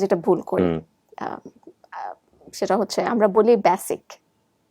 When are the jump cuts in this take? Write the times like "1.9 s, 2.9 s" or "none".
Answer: 1.0 s